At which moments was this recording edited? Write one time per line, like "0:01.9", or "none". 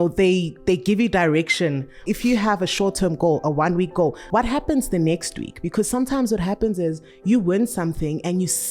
0:02.0
0:04.2